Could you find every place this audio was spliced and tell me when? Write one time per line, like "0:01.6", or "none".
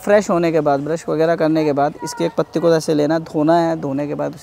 none